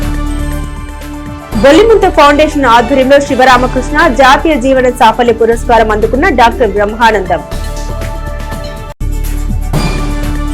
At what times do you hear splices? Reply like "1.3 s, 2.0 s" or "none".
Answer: 1.4 s